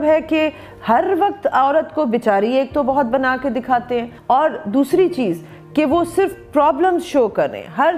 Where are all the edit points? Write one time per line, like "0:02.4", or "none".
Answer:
0:04.1